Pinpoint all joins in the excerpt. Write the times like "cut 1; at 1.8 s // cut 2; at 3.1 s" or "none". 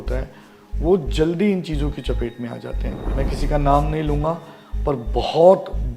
cut 1; at 2.9 s